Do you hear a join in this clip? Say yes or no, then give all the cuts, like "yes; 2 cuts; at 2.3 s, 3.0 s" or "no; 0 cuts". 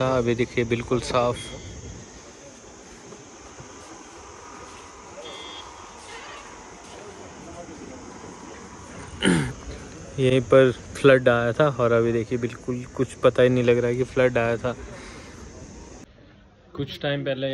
no; 0 cuts